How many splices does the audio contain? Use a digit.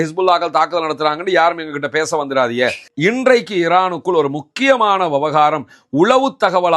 1